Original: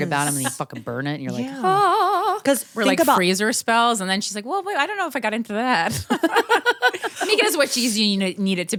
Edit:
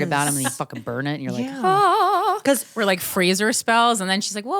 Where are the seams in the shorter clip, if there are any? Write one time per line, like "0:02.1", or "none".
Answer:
none